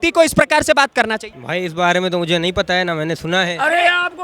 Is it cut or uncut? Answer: cut